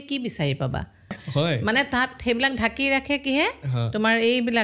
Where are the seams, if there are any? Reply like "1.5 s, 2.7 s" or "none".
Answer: 1.2 s